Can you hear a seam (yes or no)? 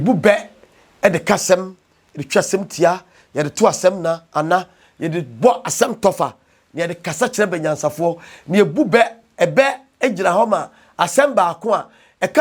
no